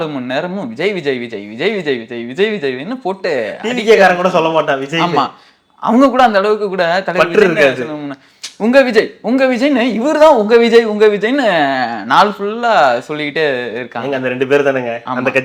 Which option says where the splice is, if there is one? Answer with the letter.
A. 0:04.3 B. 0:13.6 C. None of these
C